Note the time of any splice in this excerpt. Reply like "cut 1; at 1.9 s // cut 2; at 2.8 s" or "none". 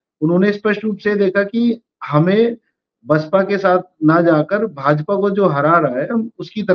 none